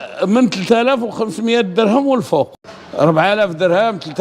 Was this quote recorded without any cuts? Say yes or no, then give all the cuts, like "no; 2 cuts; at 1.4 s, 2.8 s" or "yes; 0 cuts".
no; 1 cut; at 2.5 s